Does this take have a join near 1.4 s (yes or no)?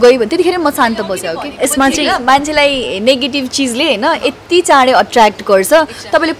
yes